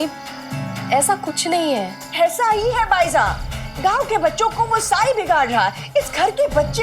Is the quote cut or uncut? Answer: uncut